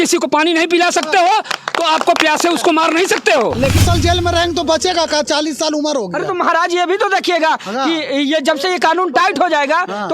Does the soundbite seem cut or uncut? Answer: cut